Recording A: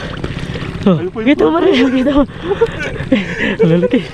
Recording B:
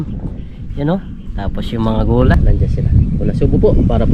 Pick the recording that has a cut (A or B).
B